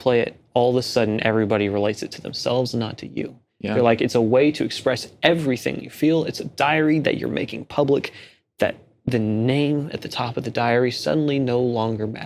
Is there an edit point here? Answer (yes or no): no